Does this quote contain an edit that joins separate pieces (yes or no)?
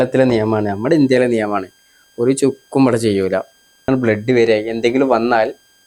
yes